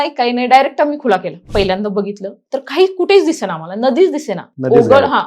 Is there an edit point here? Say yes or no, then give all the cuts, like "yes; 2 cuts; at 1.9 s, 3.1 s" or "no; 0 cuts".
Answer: yes; 1 cut; at 1.4 s